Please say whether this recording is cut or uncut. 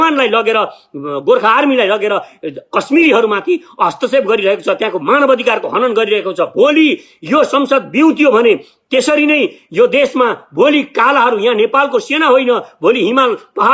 uncut